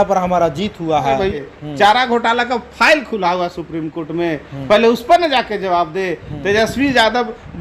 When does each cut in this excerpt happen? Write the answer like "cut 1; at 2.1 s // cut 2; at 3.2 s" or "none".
cut 1; at 1.4 s